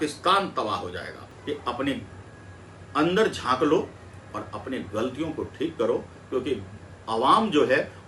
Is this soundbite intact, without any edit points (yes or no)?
no